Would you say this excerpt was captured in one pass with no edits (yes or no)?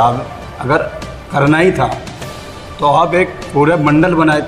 yes